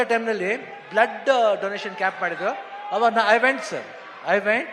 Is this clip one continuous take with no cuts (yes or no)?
yes